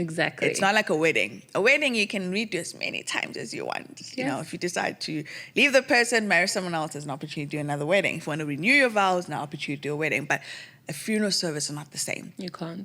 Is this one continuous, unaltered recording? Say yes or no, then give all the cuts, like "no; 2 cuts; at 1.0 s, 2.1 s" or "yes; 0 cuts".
yes; 0 cuts